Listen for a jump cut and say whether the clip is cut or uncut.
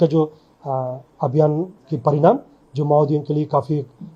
uncut